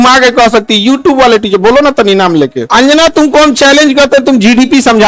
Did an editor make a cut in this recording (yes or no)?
yes